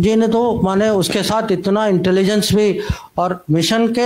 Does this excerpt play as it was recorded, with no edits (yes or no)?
yes